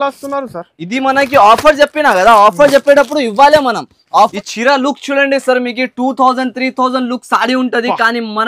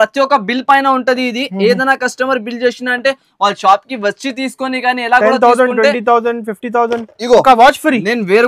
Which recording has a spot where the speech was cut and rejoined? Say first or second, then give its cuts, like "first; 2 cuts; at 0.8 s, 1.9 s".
first; 1 cut; at 4.3 s